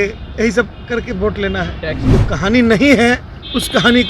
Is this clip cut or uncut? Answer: cut